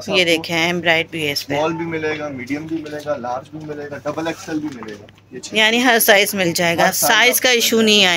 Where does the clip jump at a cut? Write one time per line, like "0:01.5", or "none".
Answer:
none